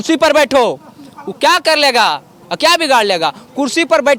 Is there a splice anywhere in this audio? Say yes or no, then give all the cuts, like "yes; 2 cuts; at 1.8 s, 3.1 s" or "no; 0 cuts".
no; 0 cuts